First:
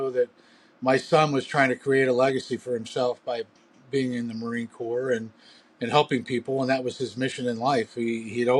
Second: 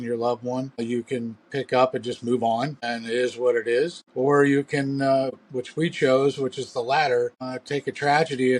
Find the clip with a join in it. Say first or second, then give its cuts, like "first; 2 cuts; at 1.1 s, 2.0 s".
second; 5 cuts; at 0.8 s, 2.8 s, 4.0 s, 5.4 s, 7.5 s